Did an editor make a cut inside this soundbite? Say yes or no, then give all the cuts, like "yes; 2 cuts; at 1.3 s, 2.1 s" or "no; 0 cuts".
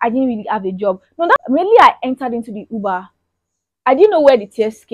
yes; 1 cut; at 1.4 s